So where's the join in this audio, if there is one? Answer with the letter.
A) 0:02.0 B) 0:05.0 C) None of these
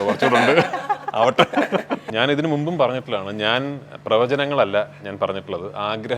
A